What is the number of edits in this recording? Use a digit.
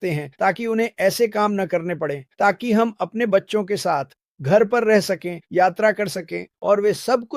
0